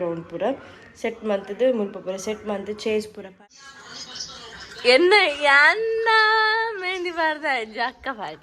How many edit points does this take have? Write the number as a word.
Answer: one